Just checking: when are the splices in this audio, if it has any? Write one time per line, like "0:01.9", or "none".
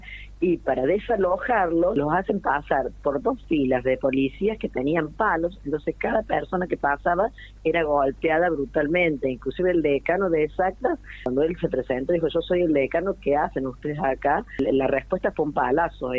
0:02.0
0:11.2
0:14.6